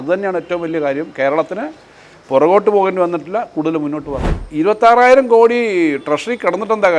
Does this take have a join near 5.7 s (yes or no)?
no